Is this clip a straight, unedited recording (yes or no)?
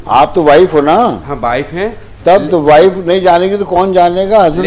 yes